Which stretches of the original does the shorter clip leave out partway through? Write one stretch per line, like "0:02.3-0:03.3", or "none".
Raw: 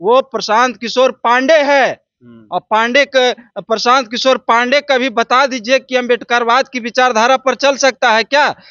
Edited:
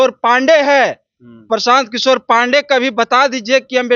0:02.3-0:03.5